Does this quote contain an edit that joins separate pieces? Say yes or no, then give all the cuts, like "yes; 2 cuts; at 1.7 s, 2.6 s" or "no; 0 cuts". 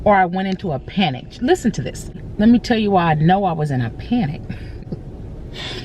yes; 2 cuts; at 2.2 s, 4.7 s